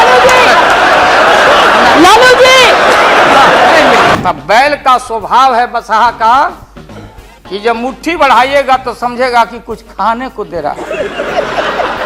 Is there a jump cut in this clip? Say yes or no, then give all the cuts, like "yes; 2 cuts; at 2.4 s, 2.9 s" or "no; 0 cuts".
yes; 1 cut; at 4.1 s